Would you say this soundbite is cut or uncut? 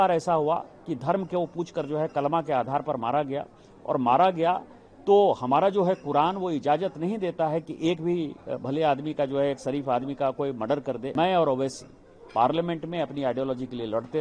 cut